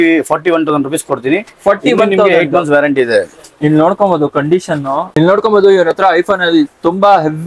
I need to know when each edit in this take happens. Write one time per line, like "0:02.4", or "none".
0:05.2

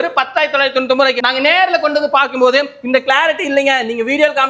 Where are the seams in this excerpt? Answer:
none

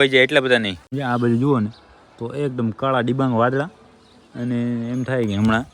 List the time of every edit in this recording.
0:00.9

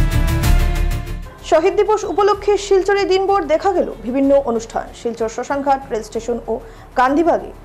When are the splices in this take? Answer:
0:01.1

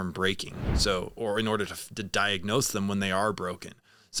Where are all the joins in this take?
none

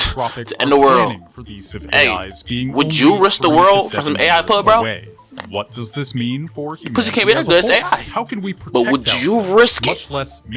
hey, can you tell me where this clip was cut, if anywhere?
0:01.7

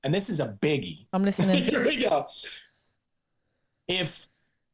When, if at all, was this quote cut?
0:01.0

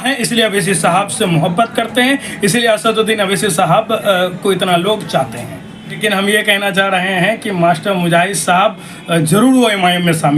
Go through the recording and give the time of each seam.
0:06.0

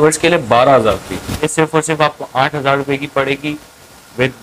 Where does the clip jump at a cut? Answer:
0:01.5

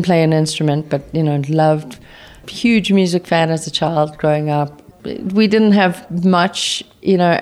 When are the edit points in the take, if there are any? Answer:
0:02.4
0:04.8

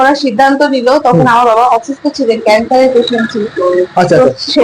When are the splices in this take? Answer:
none

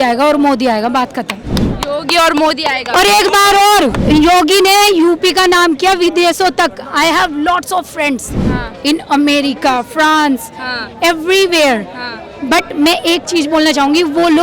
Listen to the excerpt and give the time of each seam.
0:04.1

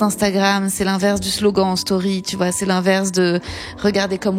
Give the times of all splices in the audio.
none

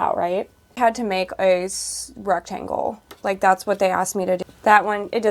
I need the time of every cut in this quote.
0:00.8
0:04.4

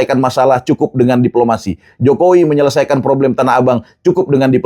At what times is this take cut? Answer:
none

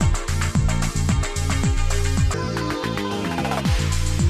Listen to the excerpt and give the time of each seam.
0:02.3

